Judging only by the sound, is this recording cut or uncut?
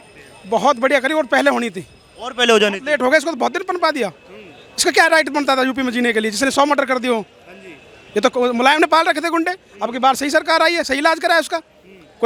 uncut